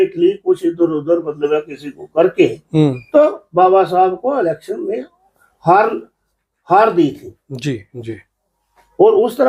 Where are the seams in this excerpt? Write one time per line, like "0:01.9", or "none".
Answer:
none

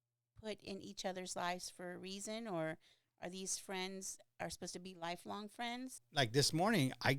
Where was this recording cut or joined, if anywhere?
0:06.0

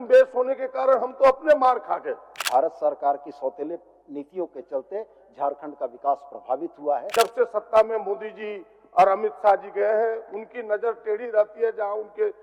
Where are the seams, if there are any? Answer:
0:02.3
0:07.1

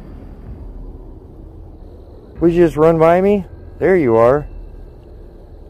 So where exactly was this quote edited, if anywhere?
0:01.8

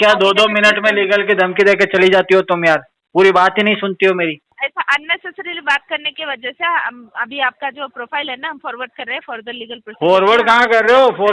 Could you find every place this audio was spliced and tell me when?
0:04.5

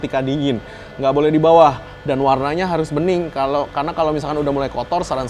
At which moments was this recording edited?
none

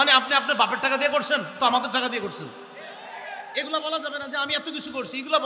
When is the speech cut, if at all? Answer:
none

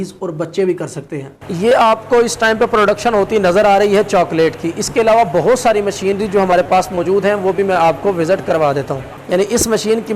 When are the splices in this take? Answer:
0:01.4
0:09.1

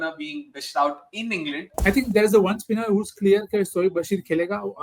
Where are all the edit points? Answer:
0:01.8

